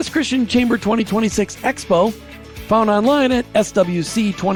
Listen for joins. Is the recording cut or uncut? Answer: uncut